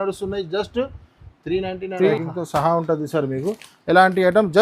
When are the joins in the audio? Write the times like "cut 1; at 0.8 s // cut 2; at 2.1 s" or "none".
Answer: cut 1; at 2.1 s

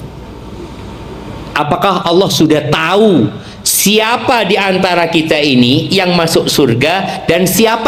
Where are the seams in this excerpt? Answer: none

